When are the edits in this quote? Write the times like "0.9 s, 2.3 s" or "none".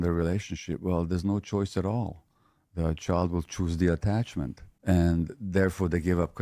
4.6 s

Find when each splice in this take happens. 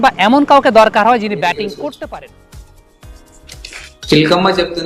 2.1 s

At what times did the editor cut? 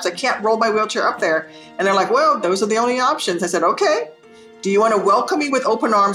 none

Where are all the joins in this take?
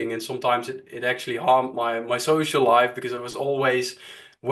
none

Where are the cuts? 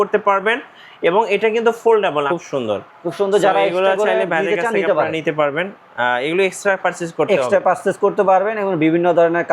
2.2 s

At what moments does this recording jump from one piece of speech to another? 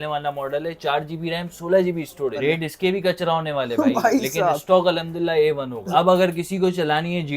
2.3 s, 5.8 s

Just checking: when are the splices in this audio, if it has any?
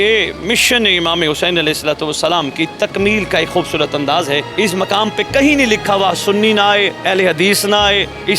4.5 s

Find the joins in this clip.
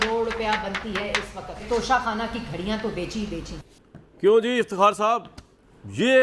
3.5 s

